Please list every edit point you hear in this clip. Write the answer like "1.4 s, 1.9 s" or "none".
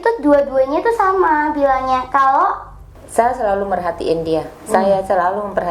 2.9 s